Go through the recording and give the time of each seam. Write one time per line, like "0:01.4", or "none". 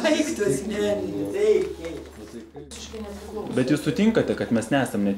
0:02.4